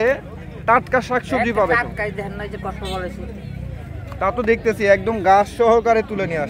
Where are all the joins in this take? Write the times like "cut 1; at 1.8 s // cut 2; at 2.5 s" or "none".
none